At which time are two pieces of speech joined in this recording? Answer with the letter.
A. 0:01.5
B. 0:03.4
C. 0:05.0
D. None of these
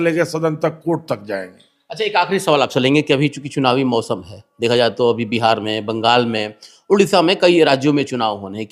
D